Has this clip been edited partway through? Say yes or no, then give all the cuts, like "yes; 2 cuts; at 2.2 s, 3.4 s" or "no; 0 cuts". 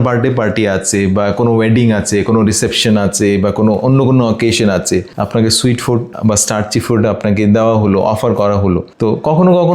no; 0 cuts